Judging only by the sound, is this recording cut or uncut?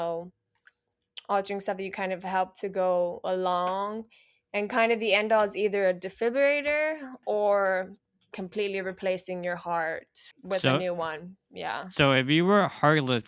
uncut